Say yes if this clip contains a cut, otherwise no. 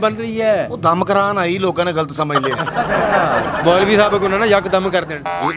no